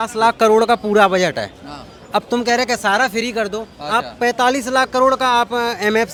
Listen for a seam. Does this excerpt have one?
no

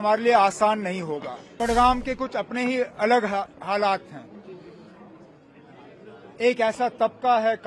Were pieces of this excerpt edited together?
yes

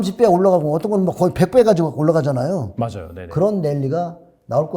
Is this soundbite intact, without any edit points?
yes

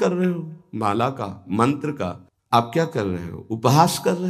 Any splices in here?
no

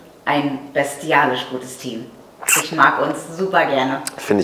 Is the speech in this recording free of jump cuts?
yes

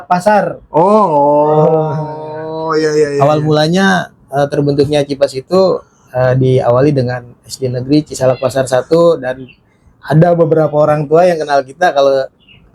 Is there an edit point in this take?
no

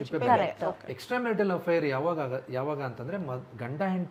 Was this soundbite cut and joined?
no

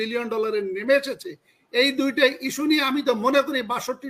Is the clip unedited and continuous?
yes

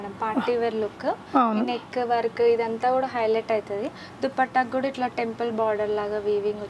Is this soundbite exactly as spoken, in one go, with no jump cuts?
yes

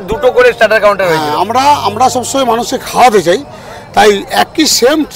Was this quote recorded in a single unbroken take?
yes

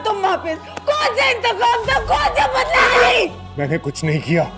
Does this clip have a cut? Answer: yes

